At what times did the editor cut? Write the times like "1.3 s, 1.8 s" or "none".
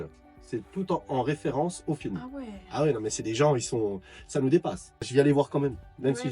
5.1 s